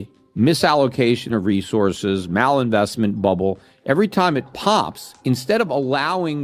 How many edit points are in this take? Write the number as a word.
zero